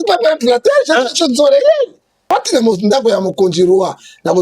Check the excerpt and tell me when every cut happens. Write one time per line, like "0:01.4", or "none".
0:02.2